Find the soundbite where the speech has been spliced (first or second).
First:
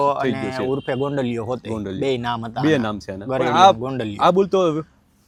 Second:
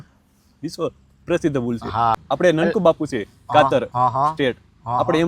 second